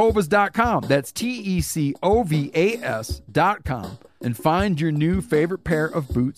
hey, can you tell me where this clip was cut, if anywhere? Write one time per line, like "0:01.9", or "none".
none